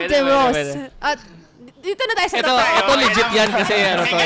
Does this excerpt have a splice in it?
no; 0 cuts

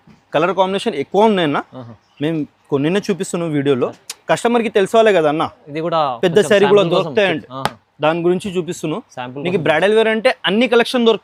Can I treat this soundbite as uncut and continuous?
yes; 0 cuts

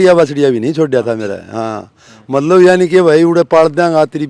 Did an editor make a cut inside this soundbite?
no; 0 cuts

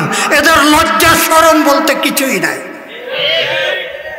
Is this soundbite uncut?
yes; 0 cuts

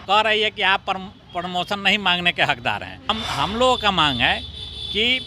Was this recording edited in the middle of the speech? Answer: yes; 1 cut; at 3.1 s

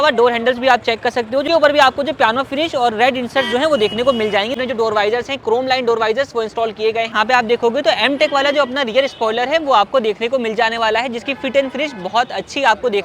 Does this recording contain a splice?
yes; 3 cuts; at 1.5 s, 4.5 s, 7.1 s

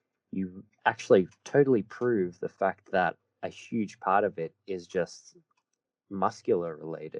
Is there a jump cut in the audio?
no; 0 cuts

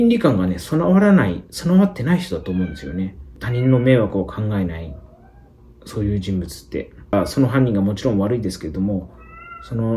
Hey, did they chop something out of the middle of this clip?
yes; 2 cuts; at 3.3 s, 7.1 s

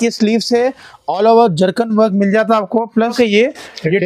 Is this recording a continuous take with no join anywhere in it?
no; 1 cut; at 3.0 s

